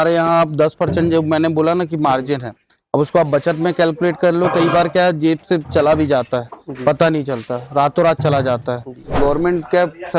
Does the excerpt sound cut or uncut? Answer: cut